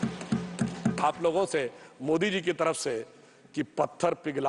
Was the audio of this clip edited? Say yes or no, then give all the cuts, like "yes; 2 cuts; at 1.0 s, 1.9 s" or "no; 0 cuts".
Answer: no; 0 cuts